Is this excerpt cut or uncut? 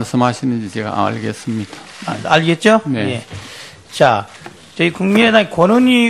cut